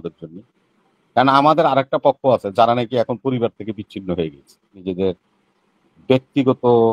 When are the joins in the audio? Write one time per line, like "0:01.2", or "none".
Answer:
0:04.9